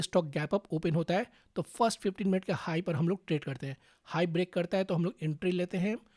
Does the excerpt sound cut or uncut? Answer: uncut